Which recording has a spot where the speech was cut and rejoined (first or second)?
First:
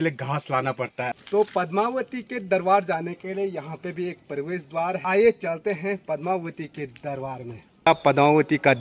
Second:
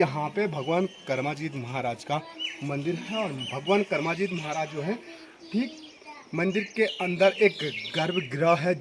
first